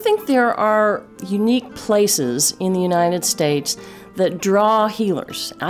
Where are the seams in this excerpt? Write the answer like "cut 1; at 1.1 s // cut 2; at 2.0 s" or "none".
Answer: cut 1; at 1.1 s